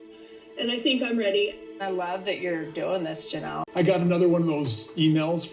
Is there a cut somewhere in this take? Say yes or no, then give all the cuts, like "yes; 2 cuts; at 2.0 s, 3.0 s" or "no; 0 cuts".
yes; 1 cut; at 3.6 s